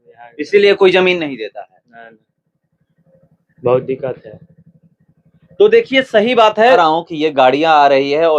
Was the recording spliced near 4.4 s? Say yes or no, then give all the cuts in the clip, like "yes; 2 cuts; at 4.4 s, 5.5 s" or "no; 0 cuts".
no; 1 cut; at 6.8 s